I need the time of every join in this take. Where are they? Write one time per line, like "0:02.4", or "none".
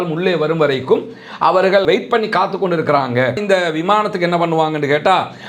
0:03.4

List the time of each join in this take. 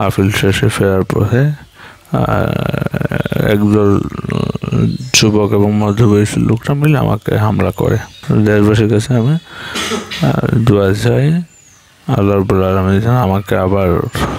0:08.2

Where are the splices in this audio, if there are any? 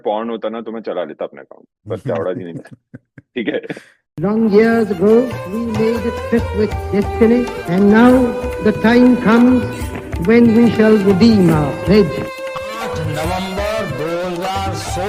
0:04.1

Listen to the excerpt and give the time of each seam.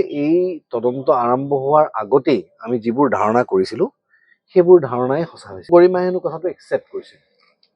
0:05.7

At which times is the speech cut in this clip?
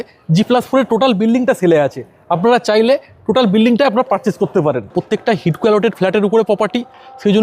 0:04.9

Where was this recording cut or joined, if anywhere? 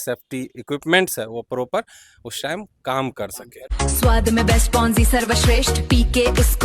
0:03.7

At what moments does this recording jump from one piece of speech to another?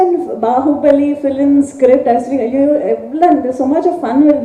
none

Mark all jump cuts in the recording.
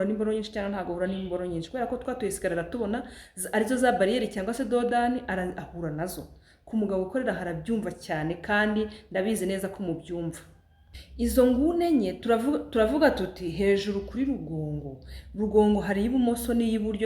0:11.0

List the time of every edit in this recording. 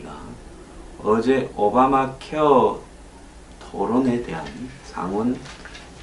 0:02.2

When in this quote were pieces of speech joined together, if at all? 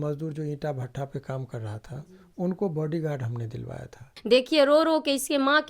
0:04.1

